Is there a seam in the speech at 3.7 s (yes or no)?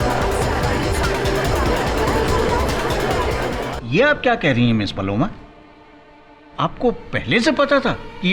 yes